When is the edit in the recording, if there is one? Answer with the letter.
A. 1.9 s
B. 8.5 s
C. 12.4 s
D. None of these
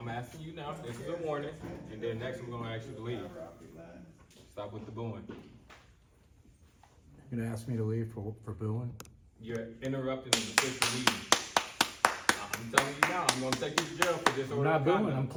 D